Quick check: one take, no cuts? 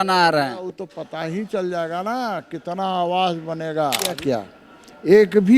no; 1 cut; at 4.2 s

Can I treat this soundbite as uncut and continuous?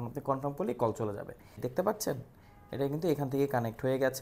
no; 1 cut; at 1.6 s

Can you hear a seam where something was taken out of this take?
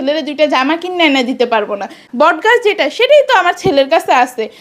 yes; 1 cut; at 2.0 s

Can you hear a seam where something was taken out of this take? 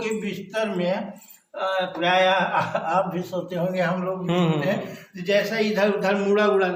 no; 0 cuts

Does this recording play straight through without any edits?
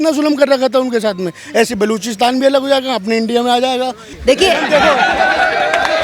no; 1 cut; at 4.1 s

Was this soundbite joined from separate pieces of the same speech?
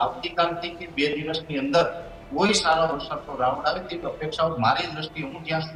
no; 0 cuts

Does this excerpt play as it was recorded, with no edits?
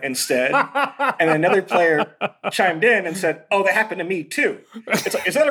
no; 1 cut; at 2.4 s

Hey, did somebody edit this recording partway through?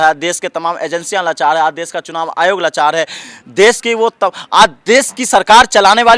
no; 0 cuts

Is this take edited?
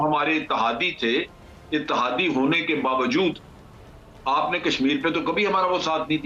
no; 0 cuts

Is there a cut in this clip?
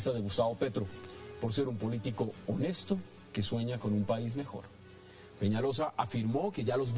yes; 1 cut; at 1.9 s

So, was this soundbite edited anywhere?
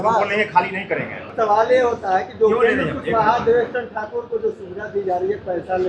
yes; 1 cut; at 1.3 s

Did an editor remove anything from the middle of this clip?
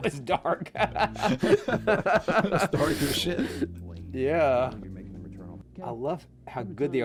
no; 0 cuts

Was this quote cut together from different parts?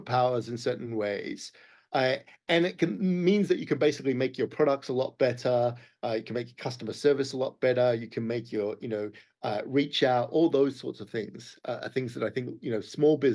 no; 0 cuts

